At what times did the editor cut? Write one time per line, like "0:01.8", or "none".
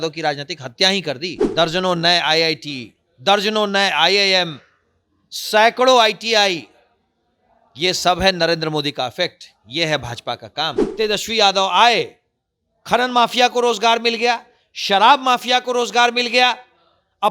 0:01.4
0:10.8